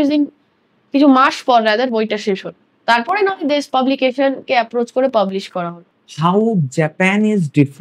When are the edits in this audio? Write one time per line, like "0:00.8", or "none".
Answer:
0:05.9